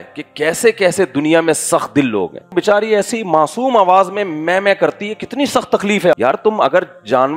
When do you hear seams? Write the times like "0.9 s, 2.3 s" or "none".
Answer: 2.5 s, 6.1 s